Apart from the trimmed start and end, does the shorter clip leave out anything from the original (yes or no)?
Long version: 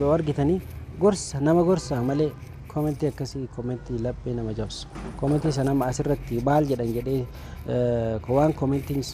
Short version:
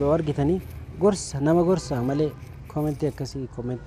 no